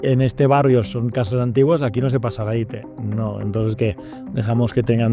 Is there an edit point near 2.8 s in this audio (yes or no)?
no